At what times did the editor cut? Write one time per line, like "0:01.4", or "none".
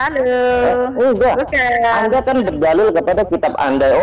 0:01.0